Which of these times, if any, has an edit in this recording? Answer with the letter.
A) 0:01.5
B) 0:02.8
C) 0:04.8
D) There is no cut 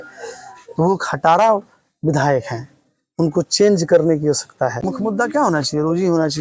C